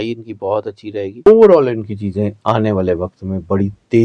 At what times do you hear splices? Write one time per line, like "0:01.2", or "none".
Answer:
0:01.1